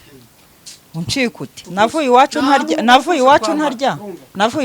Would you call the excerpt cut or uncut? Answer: cut